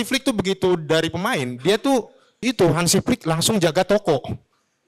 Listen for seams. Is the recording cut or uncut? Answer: cut